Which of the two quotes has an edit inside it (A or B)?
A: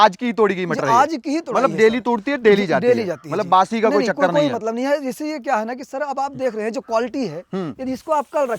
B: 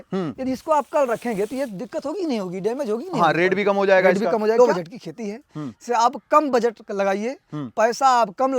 B